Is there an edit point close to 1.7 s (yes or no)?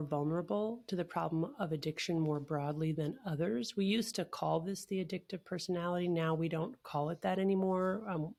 no